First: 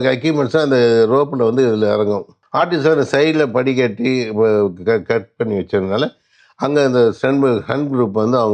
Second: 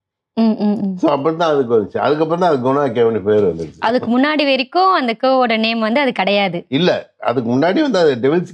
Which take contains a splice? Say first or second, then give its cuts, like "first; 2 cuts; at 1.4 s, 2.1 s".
first; 1 cut; at 2.4 s